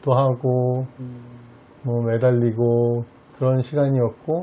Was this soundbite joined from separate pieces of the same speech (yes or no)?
no